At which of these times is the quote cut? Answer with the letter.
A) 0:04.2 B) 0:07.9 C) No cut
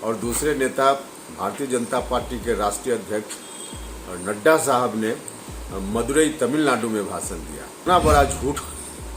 B